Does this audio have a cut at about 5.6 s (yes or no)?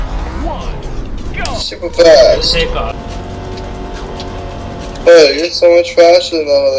no